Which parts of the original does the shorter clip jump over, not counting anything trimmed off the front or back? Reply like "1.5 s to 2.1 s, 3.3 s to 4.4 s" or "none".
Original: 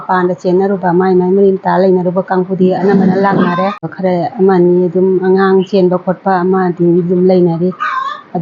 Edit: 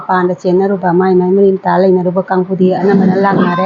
none